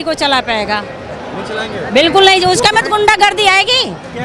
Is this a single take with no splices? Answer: yes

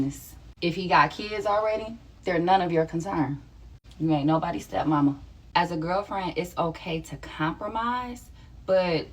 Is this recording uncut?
no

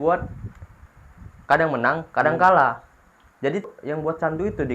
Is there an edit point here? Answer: yes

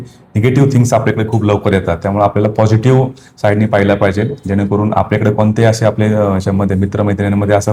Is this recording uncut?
yes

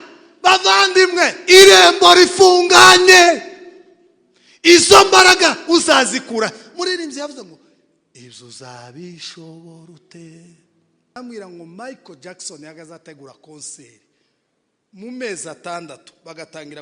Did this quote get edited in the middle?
yes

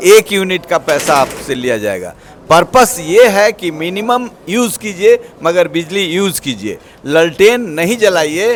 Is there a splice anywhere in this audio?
no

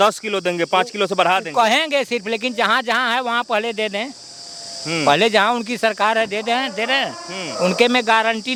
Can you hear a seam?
no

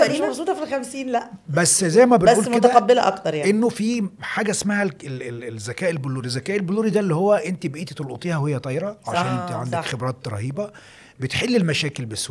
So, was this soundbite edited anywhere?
no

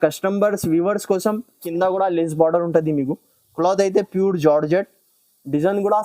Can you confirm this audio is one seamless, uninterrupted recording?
no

